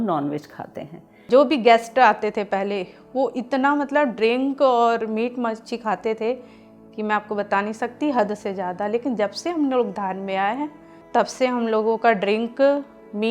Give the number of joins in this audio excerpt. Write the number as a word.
one